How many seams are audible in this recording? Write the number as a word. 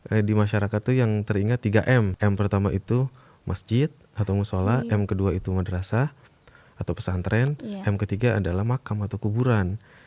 one